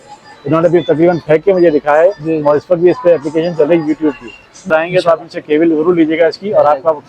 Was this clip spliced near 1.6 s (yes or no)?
no